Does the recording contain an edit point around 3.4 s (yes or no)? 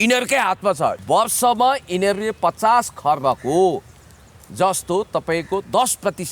no